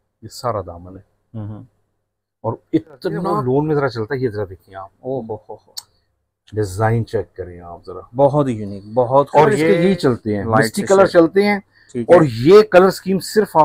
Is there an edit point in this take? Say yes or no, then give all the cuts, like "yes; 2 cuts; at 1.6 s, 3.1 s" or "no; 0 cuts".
yes; 2 cuts; at 3.3 s, 9.6 s